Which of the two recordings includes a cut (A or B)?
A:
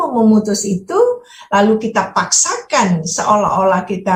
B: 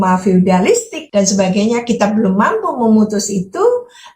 B